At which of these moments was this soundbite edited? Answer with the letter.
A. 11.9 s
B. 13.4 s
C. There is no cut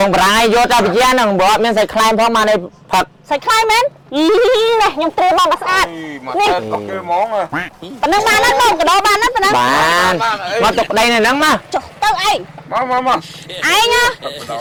C